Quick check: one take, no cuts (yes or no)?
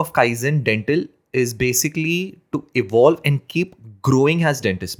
yes